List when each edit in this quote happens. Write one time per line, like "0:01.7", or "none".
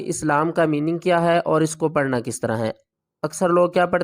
none